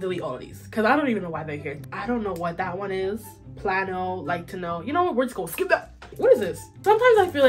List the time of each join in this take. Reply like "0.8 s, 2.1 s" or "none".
1.7 s, 6.5 s